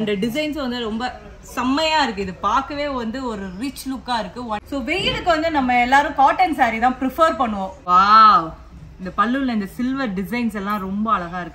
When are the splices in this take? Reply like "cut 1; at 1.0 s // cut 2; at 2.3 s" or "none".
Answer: cut 1; at 4.6 s // cut 2; at 7.8 s